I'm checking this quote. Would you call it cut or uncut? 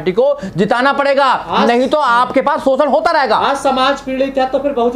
uncut